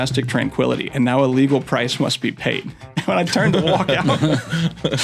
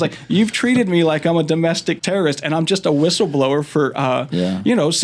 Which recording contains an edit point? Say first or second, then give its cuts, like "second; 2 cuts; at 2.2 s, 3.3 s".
second; 1 cut; at 2.0 s